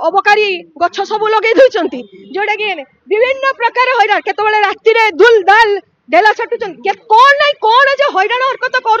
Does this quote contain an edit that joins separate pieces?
no; 0 cuts

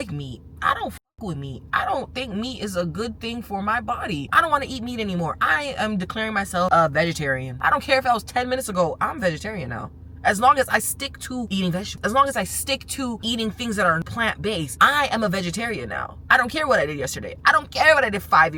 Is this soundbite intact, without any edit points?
no; 2 cuts; at 4.3 s, 7.5 s

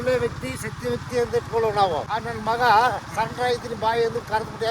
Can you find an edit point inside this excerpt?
yes; 1 cut; at 2.1 s

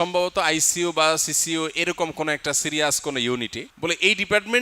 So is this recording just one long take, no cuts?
no; 1 cut; at 3.6 s

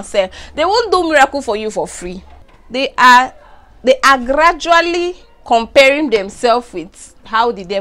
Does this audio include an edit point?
no; 0 cuts

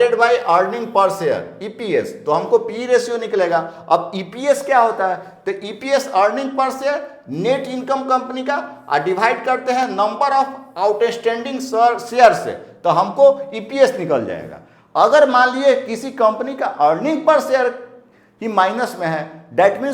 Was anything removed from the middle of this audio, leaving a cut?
no; 0 cuts

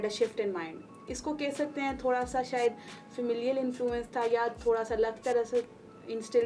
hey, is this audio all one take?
yes; 0 cuts

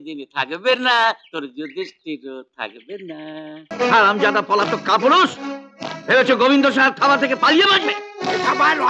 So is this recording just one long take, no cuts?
no; 1 cut; at 3.7 s

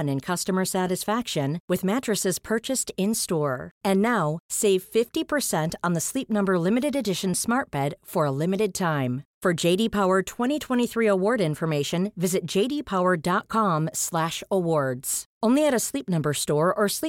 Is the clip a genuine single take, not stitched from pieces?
yes; 0 cuts

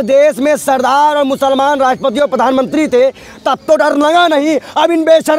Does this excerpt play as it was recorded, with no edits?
yes; 0 cuts

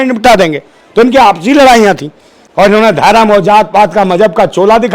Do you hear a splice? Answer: no; 0 cuts

